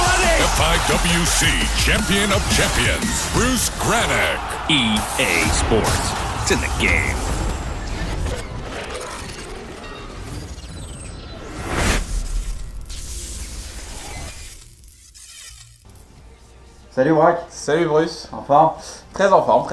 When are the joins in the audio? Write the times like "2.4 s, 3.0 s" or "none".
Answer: none